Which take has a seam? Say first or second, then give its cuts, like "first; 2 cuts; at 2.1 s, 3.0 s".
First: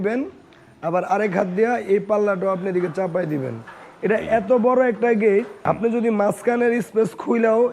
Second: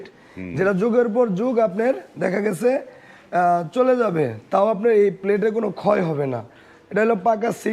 first; 1 cut; at 5.5 s